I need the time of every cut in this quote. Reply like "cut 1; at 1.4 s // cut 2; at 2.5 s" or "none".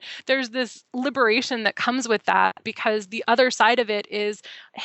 cut 1; at 2.7 s